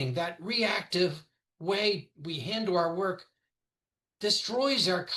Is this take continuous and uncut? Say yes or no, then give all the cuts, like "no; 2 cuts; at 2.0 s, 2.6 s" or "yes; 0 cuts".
yes; 0 cuts